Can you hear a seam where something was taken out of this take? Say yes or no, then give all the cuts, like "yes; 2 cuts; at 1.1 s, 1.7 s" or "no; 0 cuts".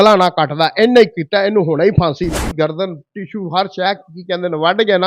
yes; 1 cut; at 2.3 s